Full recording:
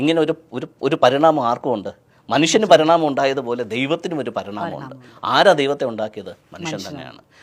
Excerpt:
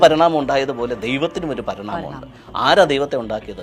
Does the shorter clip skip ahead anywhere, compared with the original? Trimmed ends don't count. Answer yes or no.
no